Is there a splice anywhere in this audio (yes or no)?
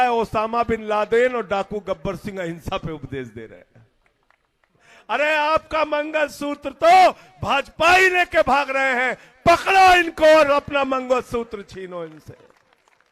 yes